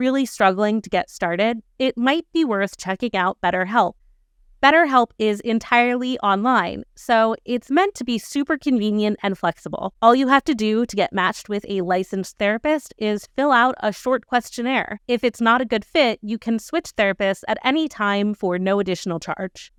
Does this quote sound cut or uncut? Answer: uncut